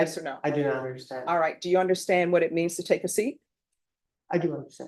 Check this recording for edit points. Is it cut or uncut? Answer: uncut